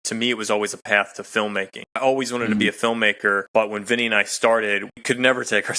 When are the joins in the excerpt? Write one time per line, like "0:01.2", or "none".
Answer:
0:02.0
0:03.4
0:04.9